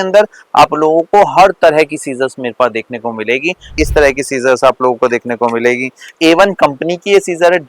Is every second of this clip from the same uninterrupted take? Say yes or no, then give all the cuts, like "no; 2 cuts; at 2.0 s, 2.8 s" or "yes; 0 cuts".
no; 2 cuts; at 3.7 s, 6.1 s